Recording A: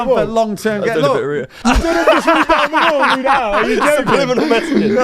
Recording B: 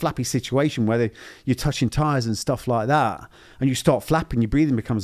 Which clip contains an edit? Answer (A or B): A